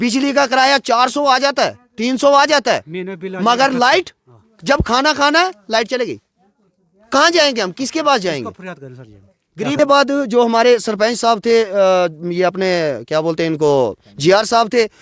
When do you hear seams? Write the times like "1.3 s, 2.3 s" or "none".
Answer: 9.8 s

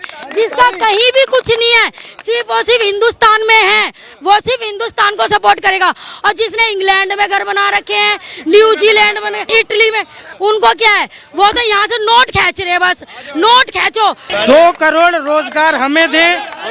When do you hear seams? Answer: 9.4 s, 10.2 s, 14.2 s

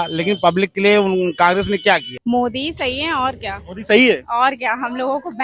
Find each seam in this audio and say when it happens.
2.1 s

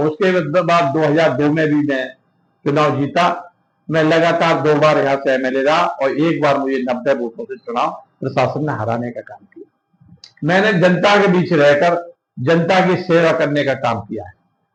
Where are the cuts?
none

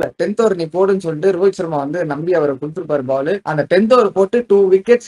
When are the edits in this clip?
none

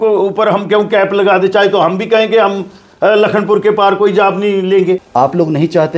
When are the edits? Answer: 5.0 s

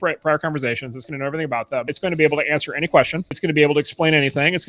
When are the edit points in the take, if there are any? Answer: 1.9 s, 3.3 s

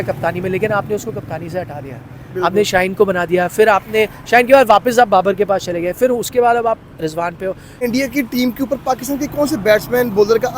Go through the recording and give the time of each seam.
7.7 s

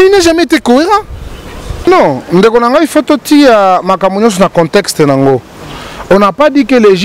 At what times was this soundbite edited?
1.9 s

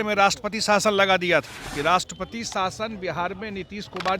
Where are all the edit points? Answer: 1.6 s

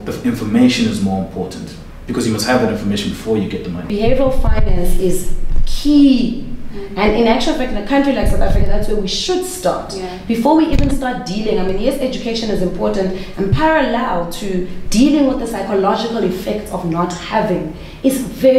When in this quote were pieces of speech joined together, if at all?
3.9 s

